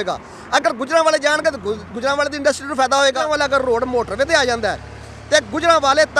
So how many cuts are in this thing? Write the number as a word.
one